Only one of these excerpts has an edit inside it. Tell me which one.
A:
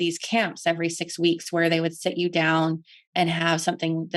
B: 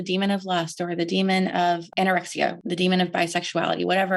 B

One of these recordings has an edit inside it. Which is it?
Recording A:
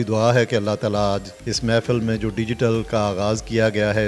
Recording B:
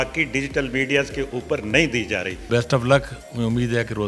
B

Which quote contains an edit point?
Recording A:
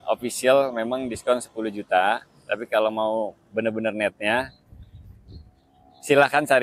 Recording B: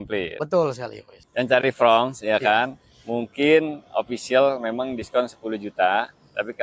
B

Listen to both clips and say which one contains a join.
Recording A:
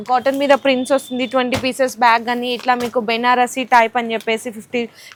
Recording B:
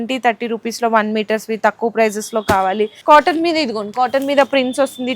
B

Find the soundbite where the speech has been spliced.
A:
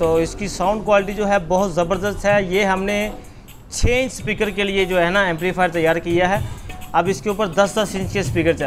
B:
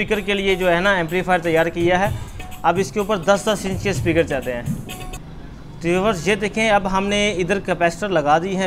B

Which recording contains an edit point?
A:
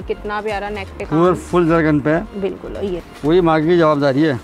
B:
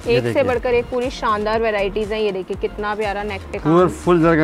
A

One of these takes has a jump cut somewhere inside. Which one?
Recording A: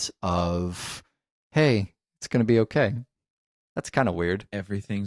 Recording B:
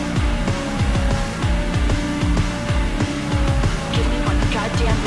A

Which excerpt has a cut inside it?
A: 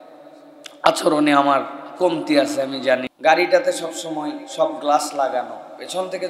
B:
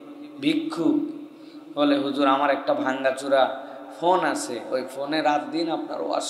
A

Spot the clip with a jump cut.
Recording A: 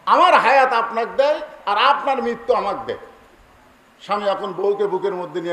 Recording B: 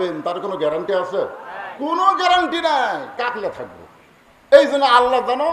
B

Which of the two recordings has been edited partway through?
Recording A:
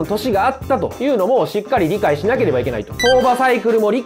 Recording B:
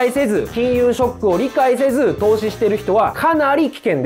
A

